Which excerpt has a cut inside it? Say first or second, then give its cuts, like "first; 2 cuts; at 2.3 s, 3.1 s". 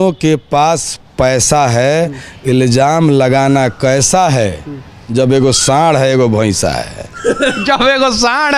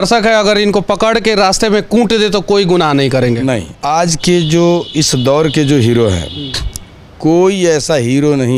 second; 1 cut; at 3.8 s